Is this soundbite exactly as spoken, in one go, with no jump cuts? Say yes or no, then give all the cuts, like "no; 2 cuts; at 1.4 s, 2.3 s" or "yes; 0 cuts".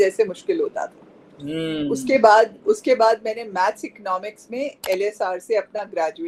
yes; 0 cuts